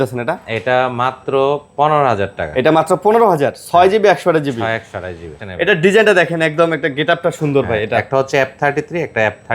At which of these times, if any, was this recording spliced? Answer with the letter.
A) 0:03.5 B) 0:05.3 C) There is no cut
B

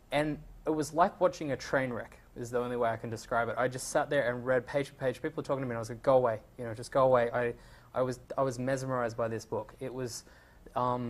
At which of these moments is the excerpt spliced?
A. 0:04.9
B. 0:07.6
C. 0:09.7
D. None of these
C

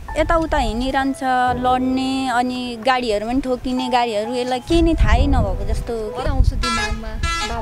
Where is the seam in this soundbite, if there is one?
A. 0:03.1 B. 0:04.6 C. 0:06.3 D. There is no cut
C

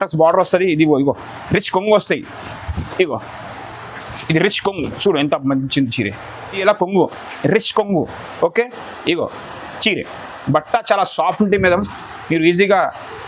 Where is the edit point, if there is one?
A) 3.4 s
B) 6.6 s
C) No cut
B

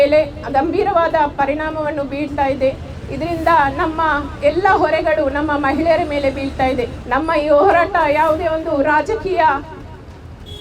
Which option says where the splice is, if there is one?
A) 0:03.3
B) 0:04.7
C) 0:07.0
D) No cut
C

